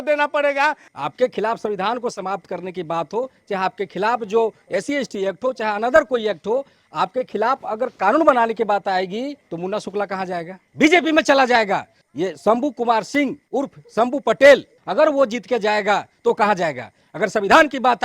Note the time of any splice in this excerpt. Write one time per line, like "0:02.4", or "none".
0:00.9
0:09.4
0:10.6
0:12.0
0:13.4
0:14.8